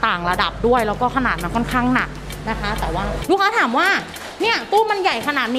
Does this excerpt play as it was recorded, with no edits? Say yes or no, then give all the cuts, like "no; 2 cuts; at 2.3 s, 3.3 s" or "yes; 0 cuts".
no; 1 cut; at 3.2 s